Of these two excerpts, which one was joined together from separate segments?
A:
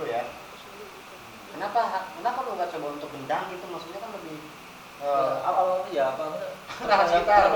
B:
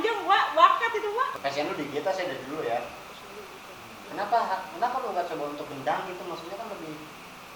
B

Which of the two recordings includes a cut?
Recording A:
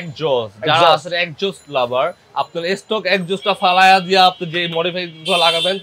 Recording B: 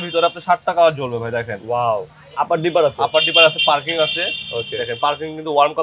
B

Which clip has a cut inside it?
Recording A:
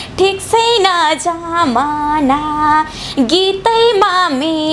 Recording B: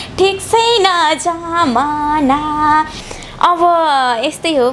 B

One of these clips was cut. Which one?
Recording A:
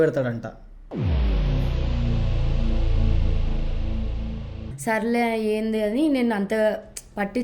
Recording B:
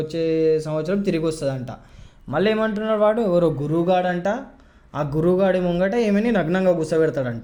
A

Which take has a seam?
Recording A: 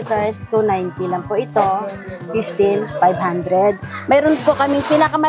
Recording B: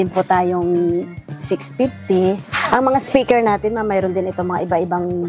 B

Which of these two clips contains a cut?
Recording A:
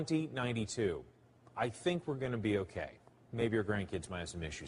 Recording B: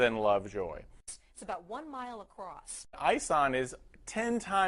B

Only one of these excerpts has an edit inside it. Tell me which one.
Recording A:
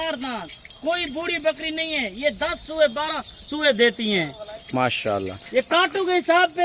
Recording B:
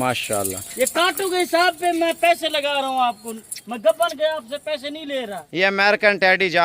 B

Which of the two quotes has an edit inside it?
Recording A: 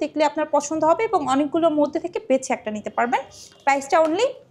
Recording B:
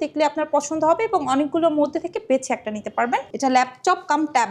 B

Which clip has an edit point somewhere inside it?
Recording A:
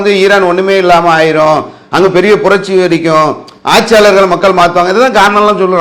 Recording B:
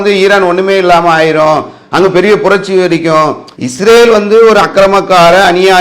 B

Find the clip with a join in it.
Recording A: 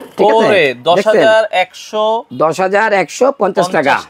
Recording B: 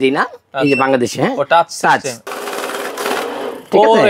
B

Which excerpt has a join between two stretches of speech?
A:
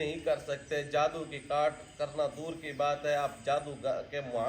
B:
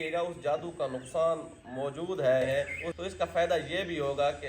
B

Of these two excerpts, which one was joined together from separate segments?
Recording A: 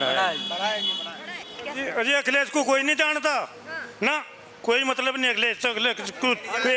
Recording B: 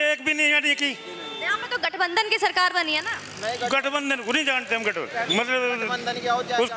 A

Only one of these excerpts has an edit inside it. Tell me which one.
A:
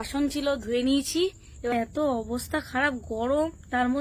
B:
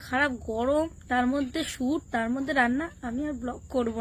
A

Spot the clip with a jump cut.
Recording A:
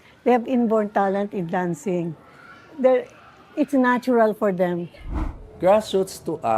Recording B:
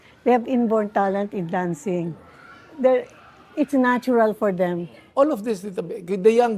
A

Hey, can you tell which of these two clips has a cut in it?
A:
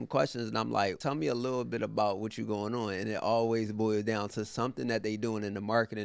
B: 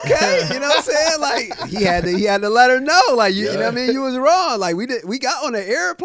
A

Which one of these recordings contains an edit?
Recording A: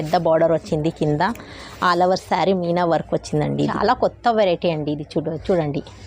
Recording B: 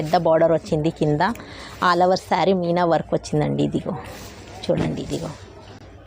A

